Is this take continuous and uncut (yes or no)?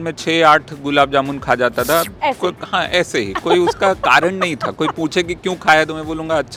yes